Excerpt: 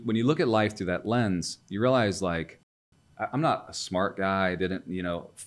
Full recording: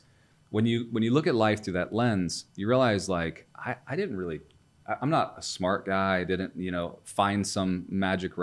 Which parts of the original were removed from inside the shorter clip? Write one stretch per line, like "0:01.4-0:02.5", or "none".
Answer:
0:03.7-0:04.5